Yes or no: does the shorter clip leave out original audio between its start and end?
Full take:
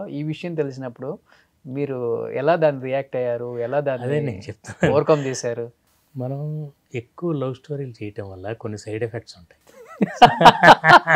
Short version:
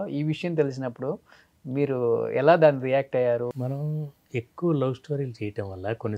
yes